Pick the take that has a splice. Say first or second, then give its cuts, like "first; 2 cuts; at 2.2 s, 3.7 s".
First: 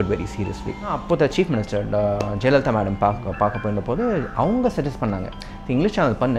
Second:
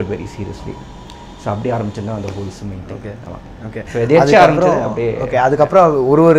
first; 1 cut; at 1.0 s